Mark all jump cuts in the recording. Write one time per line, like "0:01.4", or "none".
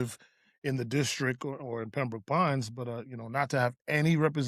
none